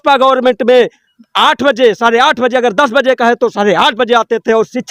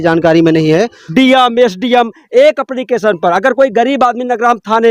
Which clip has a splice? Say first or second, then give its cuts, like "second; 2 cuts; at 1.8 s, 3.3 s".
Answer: second; 2 cuts; at 1.1 s, 2.7 s